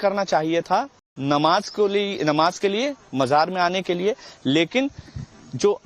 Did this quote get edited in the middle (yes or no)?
no